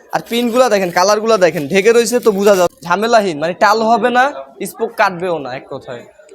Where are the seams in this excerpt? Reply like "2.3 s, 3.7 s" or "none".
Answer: 2.8 s